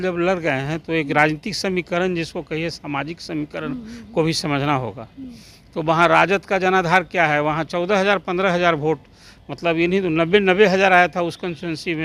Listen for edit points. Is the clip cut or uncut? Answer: uncut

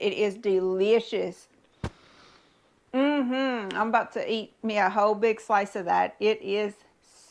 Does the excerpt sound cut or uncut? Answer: uncut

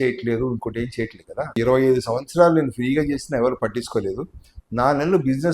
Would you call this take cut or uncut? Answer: cut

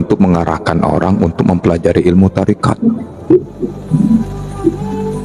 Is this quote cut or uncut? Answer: uncut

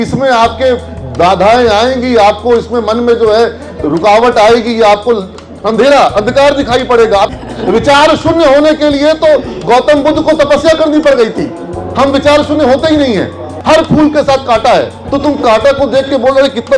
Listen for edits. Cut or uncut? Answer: cut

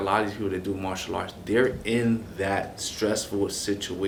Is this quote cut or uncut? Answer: uncut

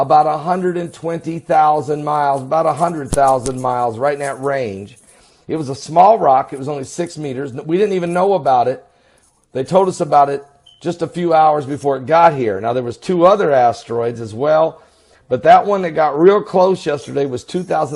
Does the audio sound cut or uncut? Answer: uncut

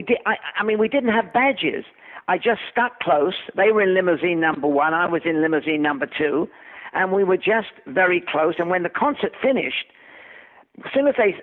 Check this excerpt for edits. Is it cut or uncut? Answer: uncut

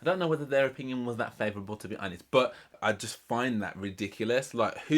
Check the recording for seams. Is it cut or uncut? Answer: cut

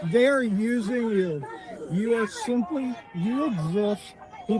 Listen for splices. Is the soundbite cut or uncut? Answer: uncut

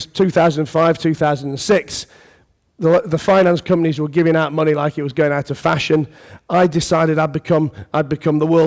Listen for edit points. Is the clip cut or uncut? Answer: uncut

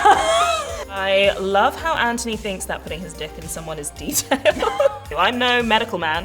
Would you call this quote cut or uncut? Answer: cut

